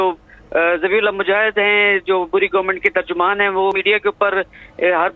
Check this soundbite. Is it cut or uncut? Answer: uncut